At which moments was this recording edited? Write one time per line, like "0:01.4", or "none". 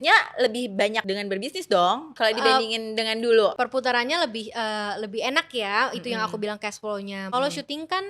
0:01.0
0:02.1
0:03.5
0:07.3